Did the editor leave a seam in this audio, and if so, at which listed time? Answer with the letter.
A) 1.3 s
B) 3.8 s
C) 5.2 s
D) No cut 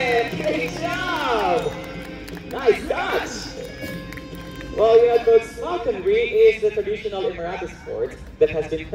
D